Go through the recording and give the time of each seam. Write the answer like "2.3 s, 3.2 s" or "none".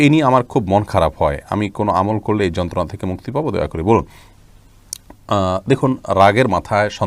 none